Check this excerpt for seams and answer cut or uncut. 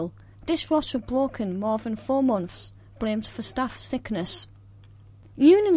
uncut